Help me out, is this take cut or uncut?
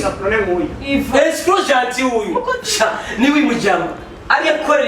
cut